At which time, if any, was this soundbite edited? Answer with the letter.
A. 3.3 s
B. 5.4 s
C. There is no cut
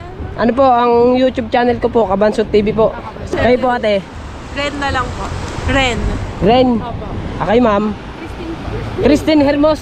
A